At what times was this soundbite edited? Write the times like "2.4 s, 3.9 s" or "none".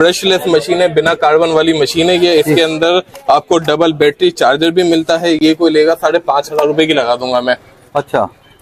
none